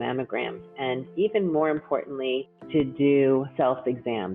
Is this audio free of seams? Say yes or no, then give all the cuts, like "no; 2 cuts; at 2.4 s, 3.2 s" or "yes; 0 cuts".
no; 2 cuts; at 2.5 s, 3.5 s